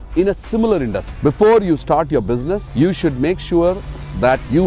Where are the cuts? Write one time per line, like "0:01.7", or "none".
0:01.0
0:02.7